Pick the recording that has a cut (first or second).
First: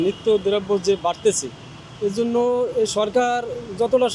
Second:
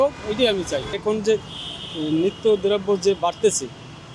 second